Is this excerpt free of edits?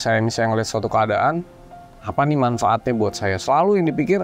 yes; 0 cuts

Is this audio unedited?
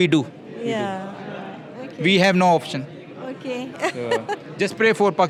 yes; 0 cuts

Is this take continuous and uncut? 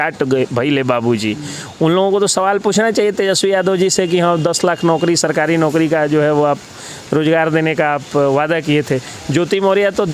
yes; 0 cuts

